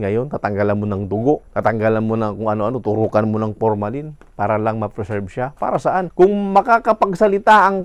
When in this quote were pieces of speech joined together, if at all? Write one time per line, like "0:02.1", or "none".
0:01.5
0:06.1